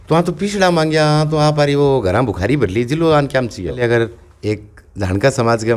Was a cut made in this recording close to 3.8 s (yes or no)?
yes